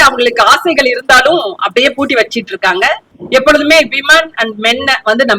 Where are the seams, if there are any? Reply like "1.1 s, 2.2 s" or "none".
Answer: 3.1 s